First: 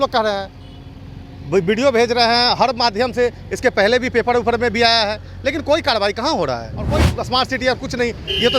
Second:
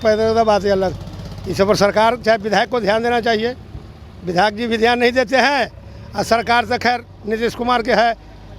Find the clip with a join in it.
first; 1 cut; at 7.1 s

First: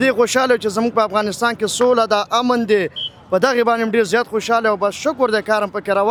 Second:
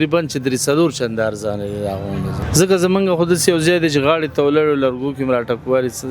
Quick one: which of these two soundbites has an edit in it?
second; 1 cut; at 2.4 s

